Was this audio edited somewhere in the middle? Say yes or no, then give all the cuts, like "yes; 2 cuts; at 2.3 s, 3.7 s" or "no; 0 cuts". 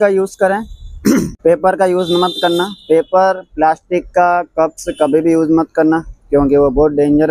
no; 0 cuts